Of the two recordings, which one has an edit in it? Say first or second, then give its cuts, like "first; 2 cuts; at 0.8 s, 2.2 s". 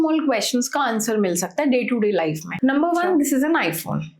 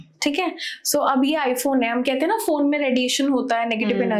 first; 1 cut; at 2.4 s